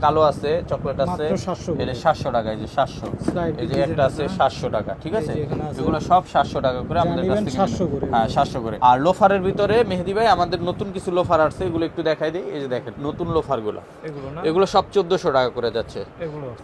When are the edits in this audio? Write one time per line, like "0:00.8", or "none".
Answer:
none